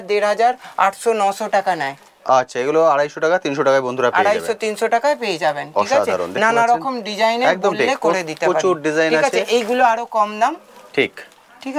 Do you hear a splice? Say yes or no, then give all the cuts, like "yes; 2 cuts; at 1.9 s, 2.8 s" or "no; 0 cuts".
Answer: no; 0 cuts